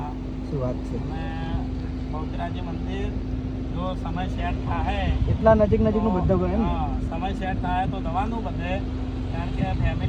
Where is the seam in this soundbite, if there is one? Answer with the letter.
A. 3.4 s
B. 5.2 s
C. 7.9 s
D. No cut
D